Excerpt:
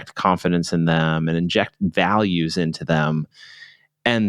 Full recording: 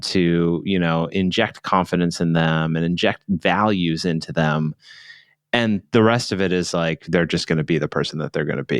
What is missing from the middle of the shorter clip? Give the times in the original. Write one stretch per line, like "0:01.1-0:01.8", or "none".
none

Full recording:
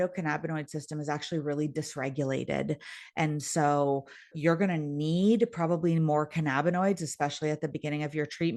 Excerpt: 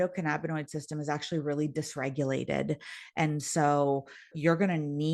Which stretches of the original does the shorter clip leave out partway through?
none

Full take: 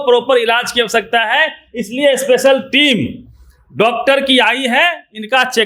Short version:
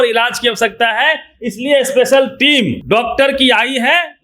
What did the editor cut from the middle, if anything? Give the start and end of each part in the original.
0:03.1-0:03.7

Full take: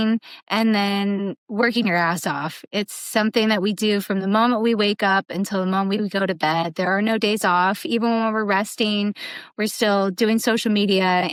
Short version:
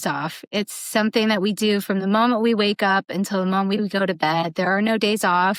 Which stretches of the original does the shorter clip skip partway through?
none

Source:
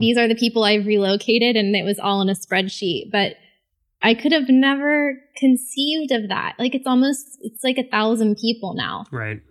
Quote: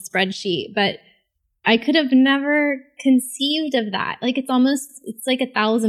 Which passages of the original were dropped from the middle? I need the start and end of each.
none

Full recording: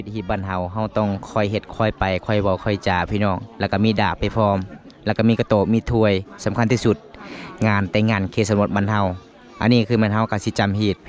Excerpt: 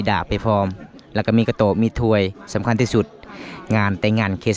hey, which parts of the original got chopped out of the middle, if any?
none

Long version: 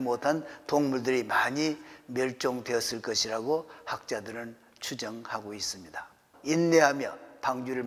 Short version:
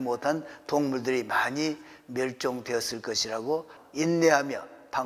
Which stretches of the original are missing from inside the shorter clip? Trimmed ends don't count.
0:03.8-0:06.3

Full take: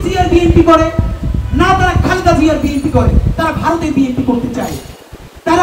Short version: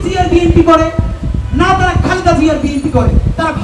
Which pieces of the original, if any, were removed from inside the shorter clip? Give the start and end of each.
none

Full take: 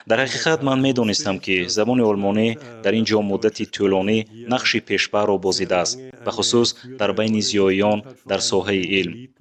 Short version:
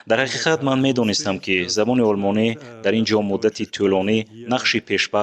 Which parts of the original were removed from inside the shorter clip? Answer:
none

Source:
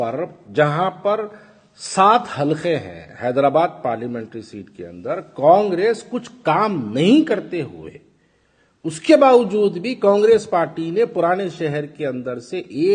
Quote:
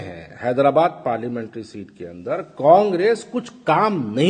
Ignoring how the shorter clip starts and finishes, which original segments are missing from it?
none

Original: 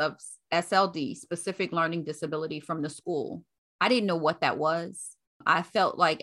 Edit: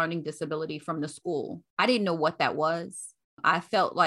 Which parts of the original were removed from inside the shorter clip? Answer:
0:03.4-0:03.6

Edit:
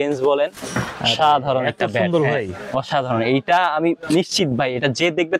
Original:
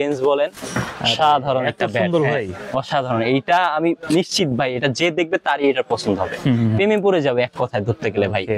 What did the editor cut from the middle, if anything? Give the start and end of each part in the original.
none

